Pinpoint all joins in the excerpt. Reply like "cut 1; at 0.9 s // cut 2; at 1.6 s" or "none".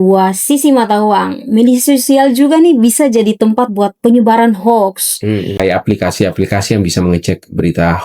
cut 1; at 5.6 s